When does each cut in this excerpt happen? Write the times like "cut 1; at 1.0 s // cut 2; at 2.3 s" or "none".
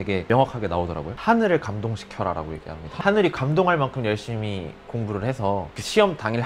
cut 1; at 1.1 s